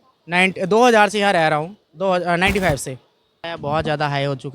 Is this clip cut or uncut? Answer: cut